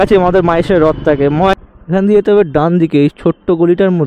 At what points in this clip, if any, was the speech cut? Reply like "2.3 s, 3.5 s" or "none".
1.5 s